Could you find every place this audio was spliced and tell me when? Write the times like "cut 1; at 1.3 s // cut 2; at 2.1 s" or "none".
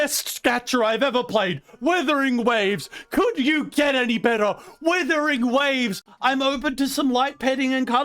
cut 1; at 6.1 s